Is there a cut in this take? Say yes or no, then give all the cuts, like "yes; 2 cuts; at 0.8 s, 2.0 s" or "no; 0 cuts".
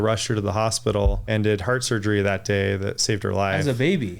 yes; 1 cut; at 1.2 s